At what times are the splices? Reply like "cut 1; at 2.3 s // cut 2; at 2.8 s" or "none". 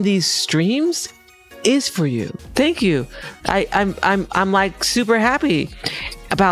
cut 1; at 2.4 s